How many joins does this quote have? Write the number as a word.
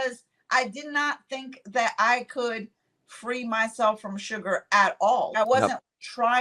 one